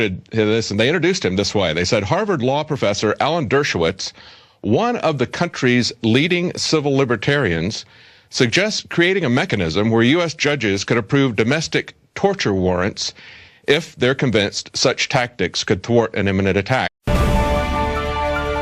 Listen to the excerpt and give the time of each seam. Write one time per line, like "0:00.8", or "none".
none

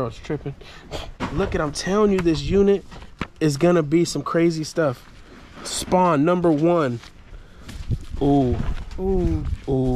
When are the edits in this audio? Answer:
0:01.2

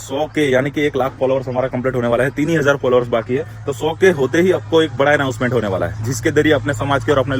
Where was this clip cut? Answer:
none

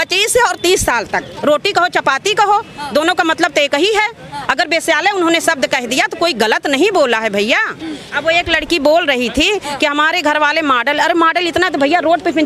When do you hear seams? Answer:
0:01.3
0:08.1

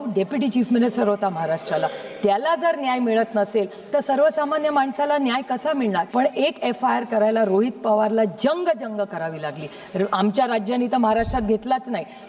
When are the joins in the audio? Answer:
0:06.1

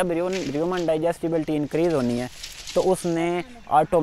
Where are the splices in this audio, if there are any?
none

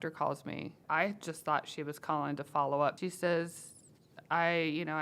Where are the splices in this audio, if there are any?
0:00.8
0:03.0

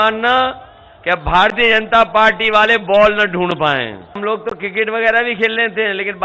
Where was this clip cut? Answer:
0:04.2

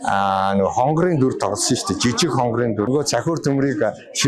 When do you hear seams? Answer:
0:02.9

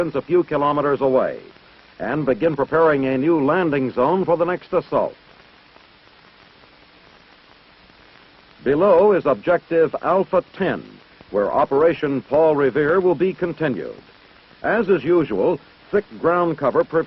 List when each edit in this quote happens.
0:05.2

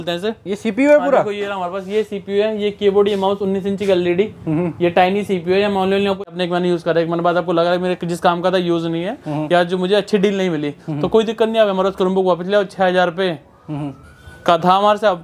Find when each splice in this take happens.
0:06.2

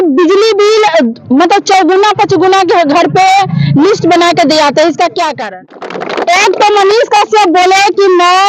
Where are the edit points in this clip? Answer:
0:05.5

